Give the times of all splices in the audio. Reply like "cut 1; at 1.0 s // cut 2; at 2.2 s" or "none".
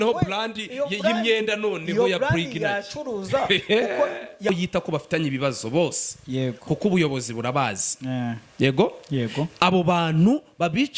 cut 1; at 4.5 s

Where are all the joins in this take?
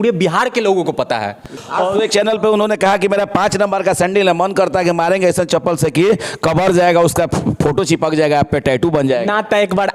cut 1; at 1.5 s

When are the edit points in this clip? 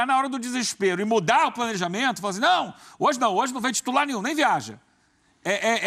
none

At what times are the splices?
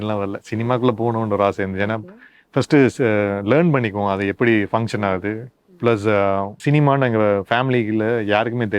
cut 1; at 6.5 s

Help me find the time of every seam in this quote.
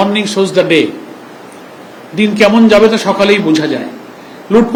none

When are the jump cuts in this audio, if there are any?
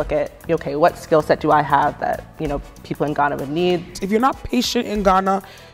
cut 1; at 4.0 s

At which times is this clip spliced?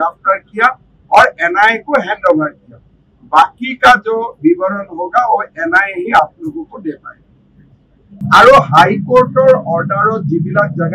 cut 1; at 8.1 s

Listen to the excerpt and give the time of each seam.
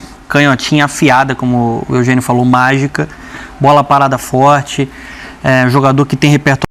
none

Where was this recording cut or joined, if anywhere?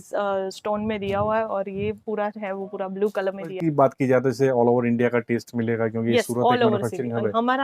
cut 1; at 3.6 s

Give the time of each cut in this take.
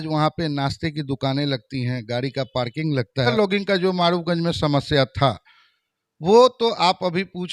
cut 1; at 3.3 s

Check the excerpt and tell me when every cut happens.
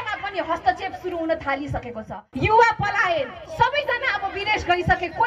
cut 1; at 2.0 s // cut 2; at 3.4 s

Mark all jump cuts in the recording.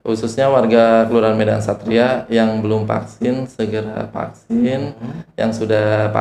none

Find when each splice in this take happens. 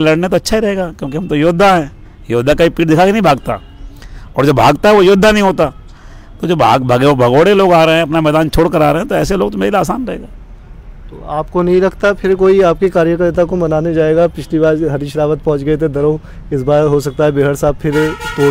none

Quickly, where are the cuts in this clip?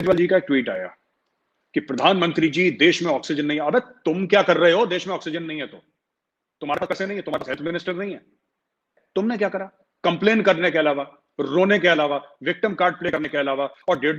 cut 1; at 9.0 s

